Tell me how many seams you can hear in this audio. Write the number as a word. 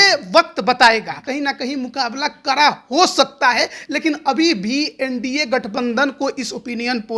one